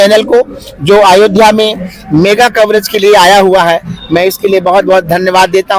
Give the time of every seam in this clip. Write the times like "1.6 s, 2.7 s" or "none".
none